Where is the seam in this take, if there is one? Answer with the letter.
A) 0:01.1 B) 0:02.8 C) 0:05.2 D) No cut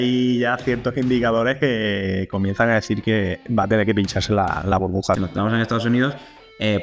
C